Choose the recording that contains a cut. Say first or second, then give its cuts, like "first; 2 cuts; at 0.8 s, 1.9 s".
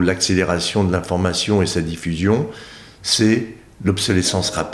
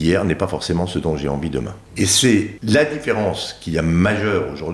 second; 2 cuts; at 1.8 s, 2.5 s